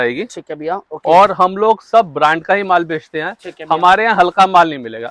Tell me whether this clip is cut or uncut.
uncut